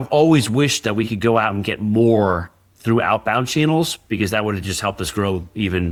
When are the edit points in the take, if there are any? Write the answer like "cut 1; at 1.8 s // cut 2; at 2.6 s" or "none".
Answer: none